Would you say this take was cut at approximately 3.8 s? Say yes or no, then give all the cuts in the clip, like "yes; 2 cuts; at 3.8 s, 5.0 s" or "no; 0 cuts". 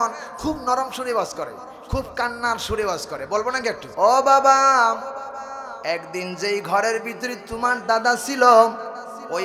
yes; 1 cut; at 3.8 s